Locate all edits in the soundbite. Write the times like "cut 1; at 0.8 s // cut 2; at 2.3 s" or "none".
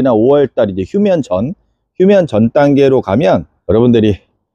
cut 1; at 3.5 s